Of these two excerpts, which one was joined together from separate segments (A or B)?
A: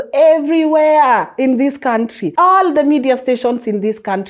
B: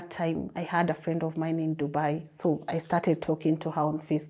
A